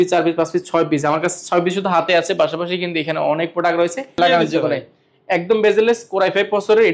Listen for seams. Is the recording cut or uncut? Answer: cut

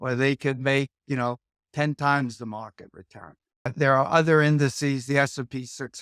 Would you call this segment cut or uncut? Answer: cut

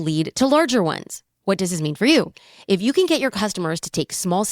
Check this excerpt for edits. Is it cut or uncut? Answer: cut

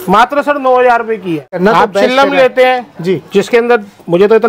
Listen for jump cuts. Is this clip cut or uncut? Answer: cut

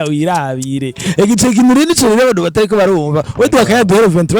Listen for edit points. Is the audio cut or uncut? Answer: uncut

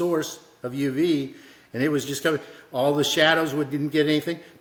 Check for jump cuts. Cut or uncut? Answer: uncut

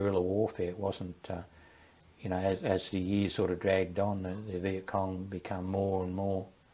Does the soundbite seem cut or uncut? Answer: uncut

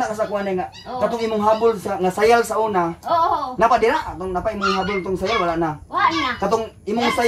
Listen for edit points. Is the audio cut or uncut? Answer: uncut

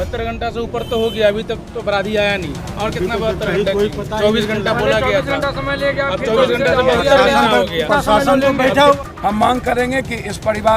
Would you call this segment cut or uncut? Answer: cut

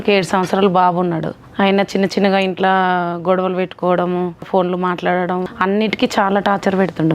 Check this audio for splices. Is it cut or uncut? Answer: cut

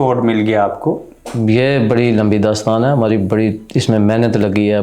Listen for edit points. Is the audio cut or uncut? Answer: cut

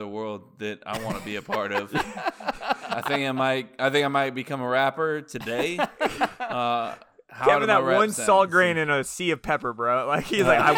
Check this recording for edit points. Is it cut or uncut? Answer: uncut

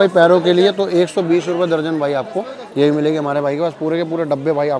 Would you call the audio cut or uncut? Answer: uncut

